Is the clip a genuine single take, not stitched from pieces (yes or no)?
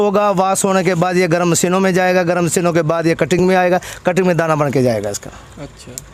yes